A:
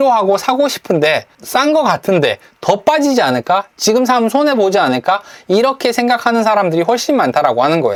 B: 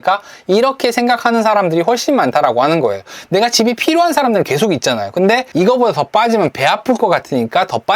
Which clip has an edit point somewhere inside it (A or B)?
B